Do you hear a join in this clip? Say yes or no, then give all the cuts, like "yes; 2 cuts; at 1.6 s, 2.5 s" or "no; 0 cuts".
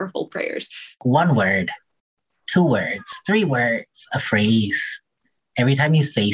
yes; 1 cut; at 1.0 s